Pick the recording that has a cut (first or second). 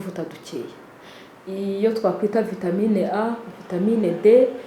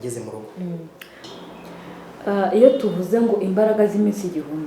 second